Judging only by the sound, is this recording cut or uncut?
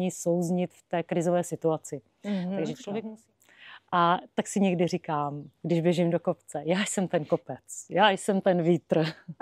cut